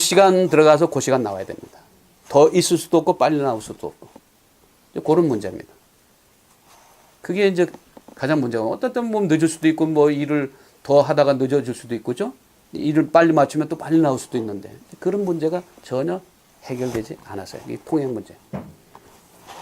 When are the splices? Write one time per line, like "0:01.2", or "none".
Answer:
0:05.2